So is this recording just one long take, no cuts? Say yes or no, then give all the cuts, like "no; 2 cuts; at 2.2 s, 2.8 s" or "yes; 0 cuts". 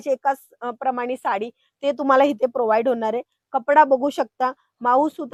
yes; 0 cuts